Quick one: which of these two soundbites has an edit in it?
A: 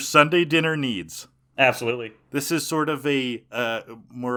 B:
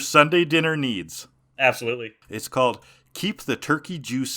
B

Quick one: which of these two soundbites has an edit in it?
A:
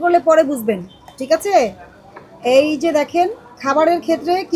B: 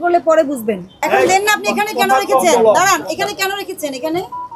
B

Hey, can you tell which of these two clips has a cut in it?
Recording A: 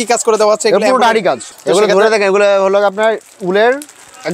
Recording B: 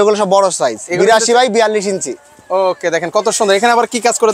A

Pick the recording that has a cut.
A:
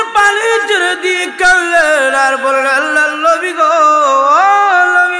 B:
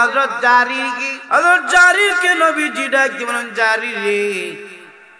B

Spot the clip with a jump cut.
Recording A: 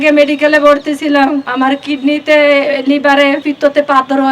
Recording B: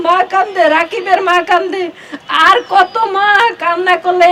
A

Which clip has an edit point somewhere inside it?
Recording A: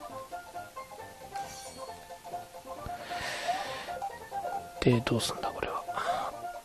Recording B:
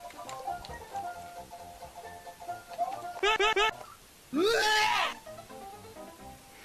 A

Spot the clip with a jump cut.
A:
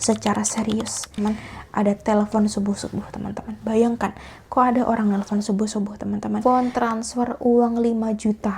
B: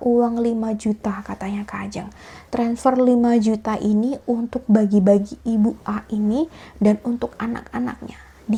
A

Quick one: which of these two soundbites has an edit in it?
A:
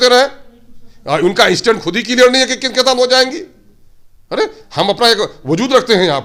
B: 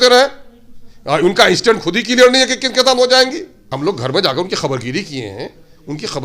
B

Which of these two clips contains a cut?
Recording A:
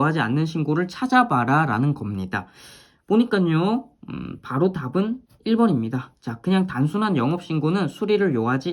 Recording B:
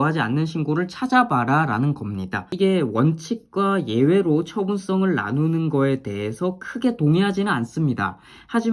B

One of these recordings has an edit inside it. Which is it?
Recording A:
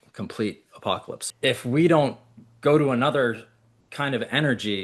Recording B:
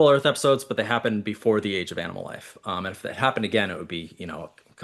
A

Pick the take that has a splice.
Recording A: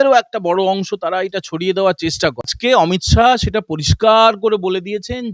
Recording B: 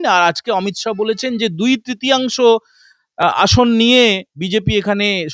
A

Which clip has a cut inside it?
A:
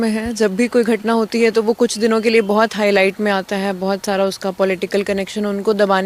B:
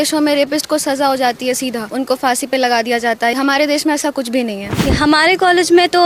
B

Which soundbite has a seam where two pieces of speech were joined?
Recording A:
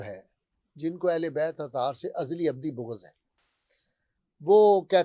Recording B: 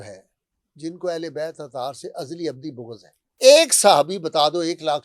B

